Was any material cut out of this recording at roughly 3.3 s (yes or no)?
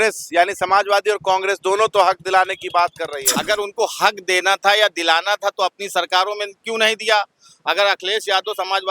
yes